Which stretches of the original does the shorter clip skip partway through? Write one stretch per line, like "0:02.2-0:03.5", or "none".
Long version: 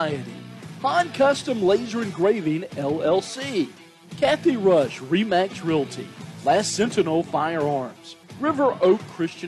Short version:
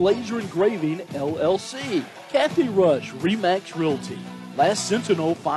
0:03.8-0:04.0